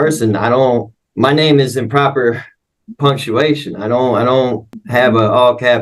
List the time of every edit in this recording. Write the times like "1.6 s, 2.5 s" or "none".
1.0 s, 4.8 s